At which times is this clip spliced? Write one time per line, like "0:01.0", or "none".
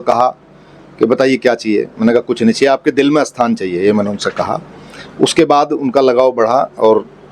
none